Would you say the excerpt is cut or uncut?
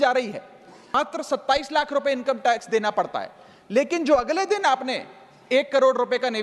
cut